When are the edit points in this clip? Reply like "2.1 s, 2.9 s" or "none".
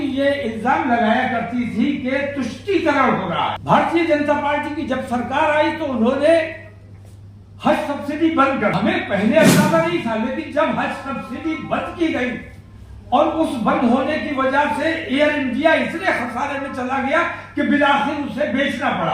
3.6 s, 8.7 s